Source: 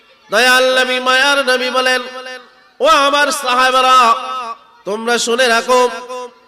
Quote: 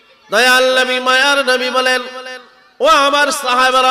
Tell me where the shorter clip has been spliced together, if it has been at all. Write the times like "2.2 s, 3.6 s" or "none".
none